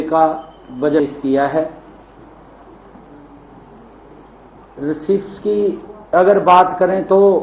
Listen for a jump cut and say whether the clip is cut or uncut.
cut